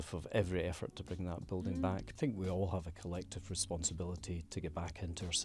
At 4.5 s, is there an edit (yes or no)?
yes